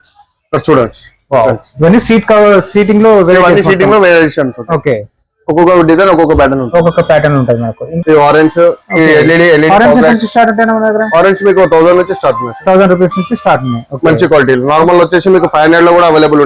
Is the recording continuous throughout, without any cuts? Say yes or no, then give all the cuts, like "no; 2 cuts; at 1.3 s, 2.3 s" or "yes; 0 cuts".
no; 1 cut; at 7.9 s